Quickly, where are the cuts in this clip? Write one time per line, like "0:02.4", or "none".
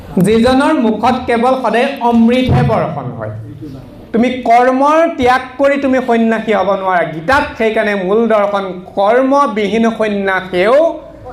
0:03.9